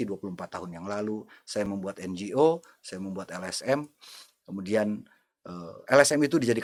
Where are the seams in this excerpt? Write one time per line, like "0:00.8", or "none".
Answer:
none